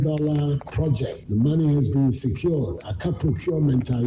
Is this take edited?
yes; 1 cut; at 1.2 s

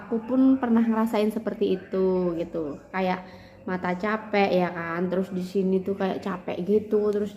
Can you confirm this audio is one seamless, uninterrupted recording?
yes; 0 cuts

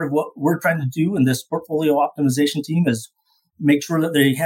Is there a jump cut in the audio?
no; 0 cuts

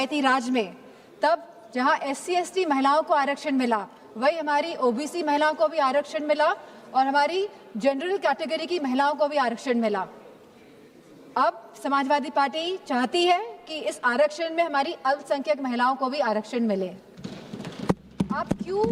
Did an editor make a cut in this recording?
no; 0 cuts

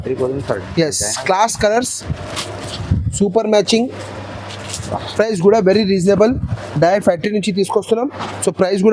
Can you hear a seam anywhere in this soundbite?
no; 0 cuts

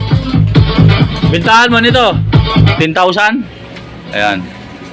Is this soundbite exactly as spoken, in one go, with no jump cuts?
no; 1 cut; at 2.7 s

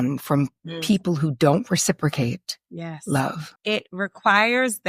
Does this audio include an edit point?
yes; 1 cut; at 3.6 s

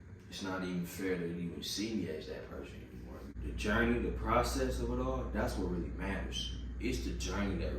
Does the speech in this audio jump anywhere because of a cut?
yes; 1 cut; at 3.4 s

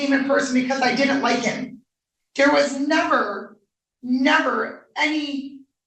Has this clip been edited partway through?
no; 0 cuts

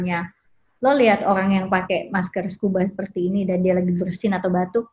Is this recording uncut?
yes; 0 cuts

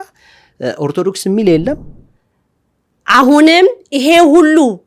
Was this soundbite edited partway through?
yes; 1 cut; at 1.9 s

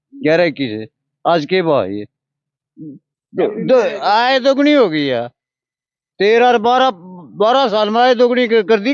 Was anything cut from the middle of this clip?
no; 0 cuts

